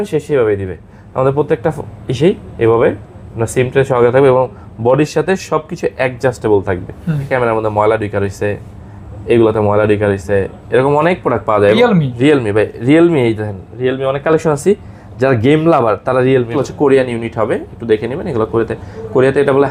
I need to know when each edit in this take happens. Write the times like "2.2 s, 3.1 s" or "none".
7.3 s, 11.8 s, 16.6 s